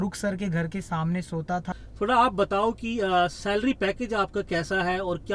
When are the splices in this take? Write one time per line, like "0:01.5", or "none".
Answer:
0:01.7